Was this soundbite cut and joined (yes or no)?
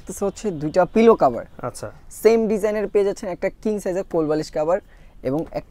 no